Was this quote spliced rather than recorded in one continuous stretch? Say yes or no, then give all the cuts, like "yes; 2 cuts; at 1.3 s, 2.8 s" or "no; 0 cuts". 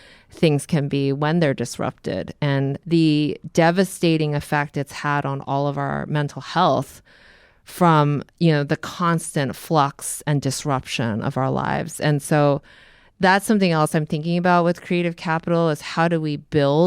yes; 1 cut; at 2.8 s